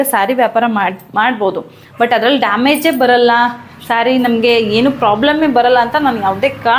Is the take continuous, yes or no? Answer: yes